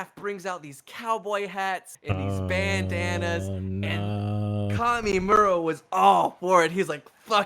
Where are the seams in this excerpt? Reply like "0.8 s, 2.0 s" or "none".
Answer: 1.9 s

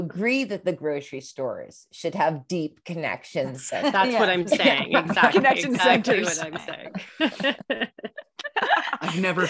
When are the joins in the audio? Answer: none

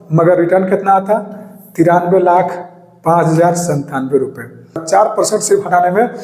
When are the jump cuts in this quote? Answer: 4.8 s

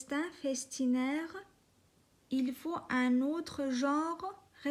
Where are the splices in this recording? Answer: none

